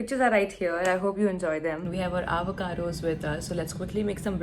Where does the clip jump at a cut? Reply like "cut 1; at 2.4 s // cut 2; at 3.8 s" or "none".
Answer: cut 1; at 1.9 s